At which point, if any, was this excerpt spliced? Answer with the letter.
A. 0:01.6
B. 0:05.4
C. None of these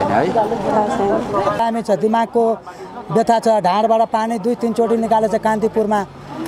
A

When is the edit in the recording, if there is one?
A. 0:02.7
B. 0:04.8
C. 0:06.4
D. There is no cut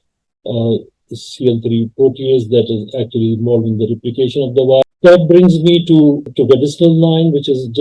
B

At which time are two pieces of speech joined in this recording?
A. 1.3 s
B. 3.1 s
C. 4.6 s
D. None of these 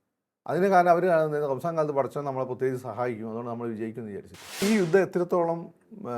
C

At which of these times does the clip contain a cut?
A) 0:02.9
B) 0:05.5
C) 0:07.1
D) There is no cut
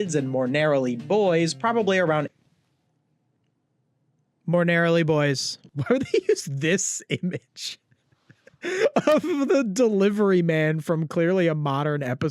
B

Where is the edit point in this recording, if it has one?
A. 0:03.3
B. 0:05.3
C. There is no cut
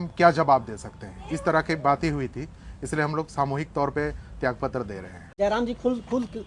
B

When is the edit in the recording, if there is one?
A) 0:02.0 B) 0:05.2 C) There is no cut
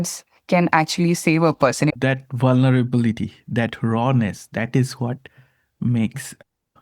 A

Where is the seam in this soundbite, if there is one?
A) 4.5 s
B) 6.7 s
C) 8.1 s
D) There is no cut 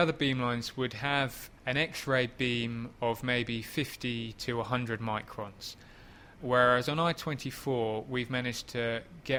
D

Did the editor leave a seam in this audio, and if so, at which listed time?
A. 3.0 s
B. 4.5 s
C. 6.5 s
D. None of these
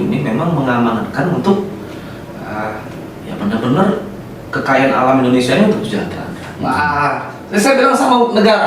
C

